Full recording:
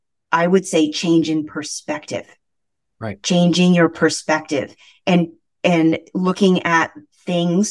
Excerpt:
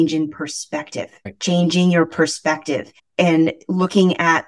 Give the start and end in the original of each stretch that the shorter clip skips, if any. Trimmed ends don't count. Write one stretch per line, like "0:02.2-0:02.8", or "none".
0:02.4-0:03.1
0:04.8-0:05.4